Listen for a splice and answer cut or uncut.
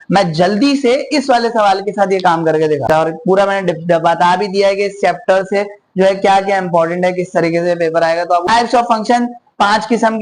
cut